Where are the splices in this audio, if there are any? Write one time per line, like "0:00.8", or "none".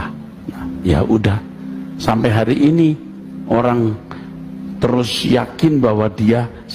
none